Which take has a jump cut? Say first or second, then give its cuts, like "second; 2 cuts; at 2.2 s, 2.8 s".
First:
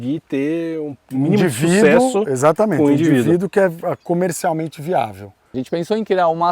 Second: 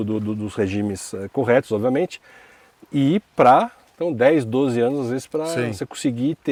first; 1 cut; at 5.5 s